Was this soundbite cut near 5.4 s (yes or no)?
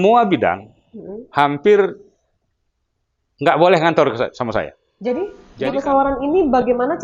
yes